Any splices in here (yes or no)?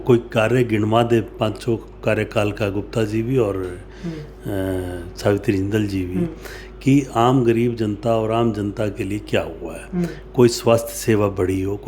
no